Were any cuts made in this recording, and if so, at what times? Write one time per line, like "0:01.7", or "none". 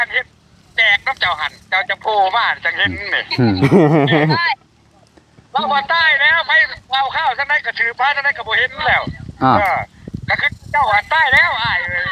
none